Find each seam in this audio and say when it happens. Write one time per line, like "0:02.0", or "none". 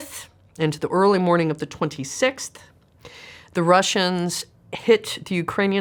none